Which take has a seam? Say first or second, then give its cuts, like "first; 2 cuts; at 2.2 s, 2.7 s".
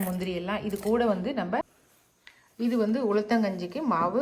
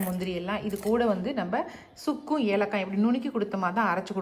first; 1 cut; at 1.8 s